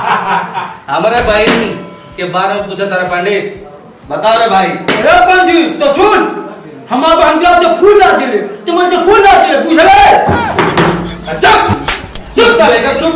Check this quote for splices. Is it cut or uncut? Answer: uncut